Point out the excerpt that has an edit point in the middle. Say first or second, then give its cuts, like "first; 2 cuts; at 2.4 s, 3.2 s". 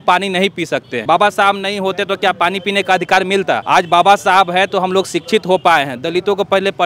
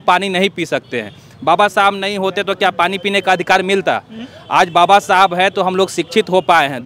first; 2 cuts; at 0.9 s, 3.6 s